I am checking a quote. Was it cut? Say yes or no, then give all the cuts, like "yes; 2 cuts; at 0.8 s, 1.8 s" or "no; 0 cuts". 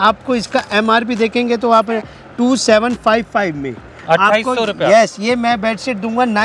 no; 0 cuts